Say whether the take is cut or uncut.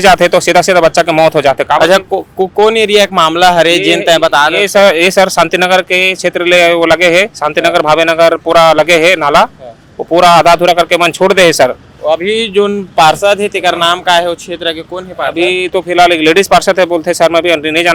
uncut